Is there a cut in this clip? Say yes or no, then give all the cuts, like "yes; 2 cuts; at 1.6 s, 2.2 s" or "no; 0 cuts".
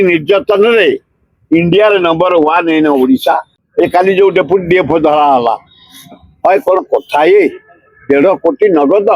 yes; 1 cut; at 3.6 s